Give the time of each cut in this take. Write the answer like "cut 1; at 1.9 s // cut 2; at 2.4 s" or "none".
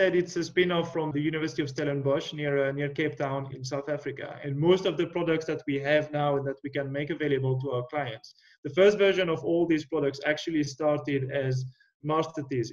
cut 1; at 1.1 s // cut 2; at 3.5 s